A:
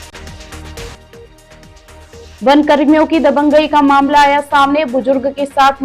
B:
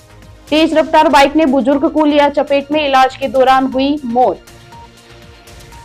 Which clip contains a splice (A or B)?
A